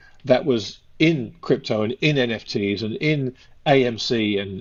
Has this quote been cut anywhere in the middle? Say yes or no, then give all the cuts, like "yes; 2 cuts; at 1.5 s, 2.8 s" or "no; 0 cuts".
no; 0 cuts